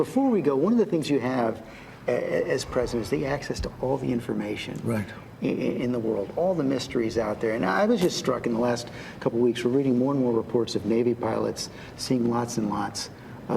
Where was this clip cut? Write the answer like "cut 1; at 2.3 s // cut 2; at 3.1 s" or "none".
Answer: none